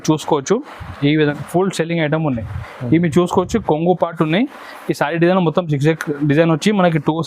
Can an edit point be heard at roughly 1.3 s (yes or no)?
yes